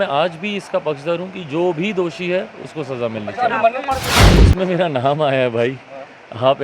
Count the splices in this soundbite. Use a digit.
1